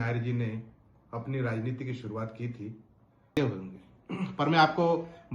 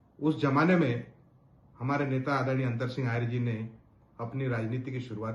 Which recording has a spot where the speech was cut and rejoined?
first; 1 cut; at 3.3 s

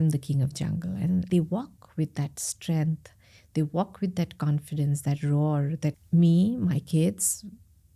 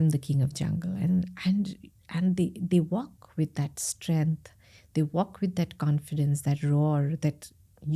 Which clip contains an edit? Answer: first; 2 cuts; at 1.3 s, 6.0 s

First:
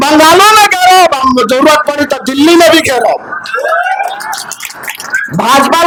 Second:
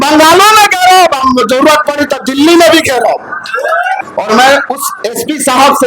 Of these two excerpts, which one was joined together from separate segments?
second; 1 cut; at 4.0 s

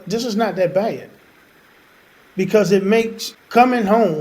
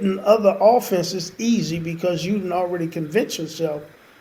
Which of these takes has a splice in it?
first; 1 cut; at 3.2 s

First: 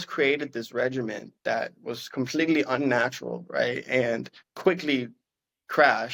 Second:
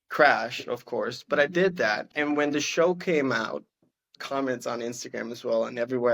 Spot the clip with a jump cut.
second; 2 cuts; at 2.1 s, 4.2 s

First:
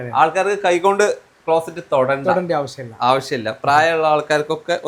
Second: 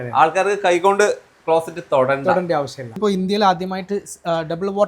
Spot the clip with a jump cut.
second; 1 cut; at 3.0 s

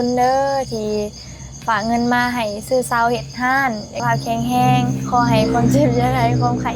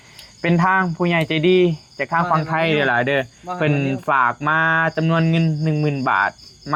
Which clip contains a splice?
first; 1 cut; at 4.0 s

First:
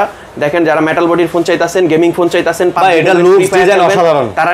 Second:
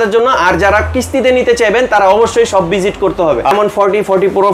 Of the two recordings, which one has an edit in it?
second; 1 cut; at 3.5 s

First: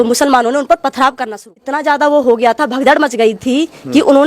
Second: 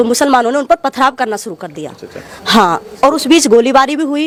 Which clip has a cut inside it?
first; 1 cut; at 1.7 s

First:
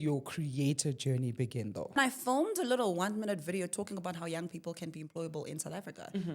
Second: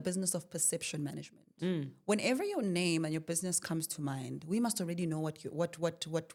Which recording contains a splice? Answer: first; 1 cut; at 2.0 s

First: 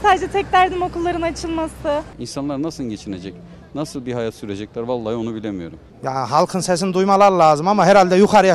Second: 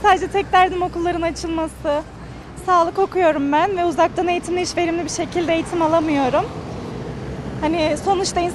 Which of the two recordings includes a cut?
first; 2 cuts; at 2.2 s, 5.8 s

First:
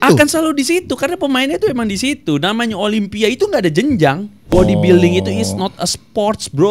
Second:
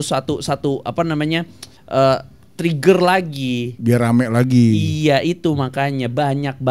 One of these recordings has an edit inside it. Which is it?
first; 1 cut; at 4.5 s

